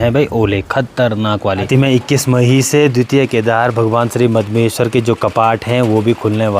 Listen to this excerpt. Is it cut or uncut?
cut